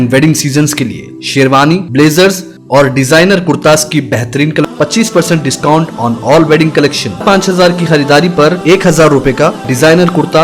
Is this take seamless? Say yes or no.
no